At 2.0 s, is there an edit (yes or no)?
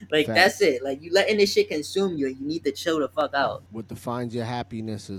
no